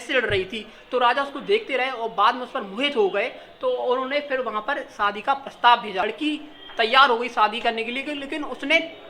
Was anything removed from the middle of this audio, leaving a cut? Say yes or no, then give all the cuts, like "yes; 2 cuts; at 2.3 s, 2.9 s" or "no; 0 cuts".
yes; 1 cut; at 6.0 s